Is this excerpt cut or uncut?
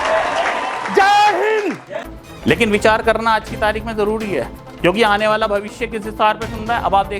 cut